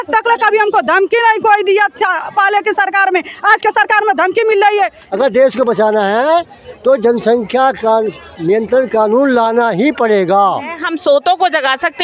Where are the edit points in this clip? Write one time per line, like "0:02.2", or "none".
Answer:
0:05.0
0:10.8